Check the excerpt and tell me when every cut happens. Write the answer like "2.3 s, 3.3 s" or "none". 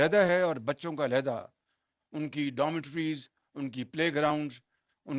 none